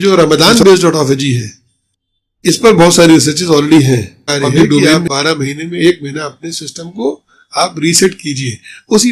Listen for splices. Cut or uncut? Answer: cut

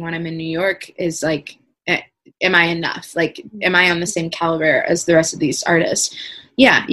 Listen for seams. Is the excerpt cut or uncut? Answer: uncut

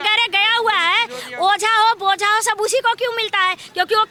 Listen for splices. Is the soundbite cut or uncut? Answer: uncut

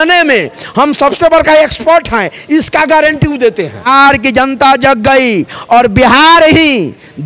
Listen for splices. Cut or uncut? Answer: cut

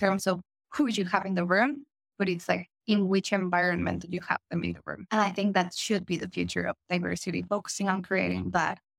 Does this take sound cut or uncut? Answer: cut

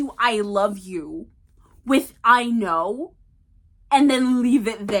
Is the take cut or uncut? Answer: uncut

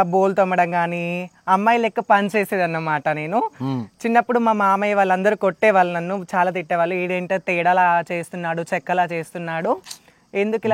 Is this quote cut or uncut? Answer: uncut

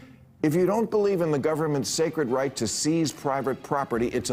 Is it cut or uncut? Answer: uncut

